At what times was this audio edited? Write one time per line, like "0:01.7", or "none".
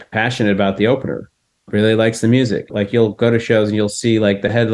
0:01.7
0:02.7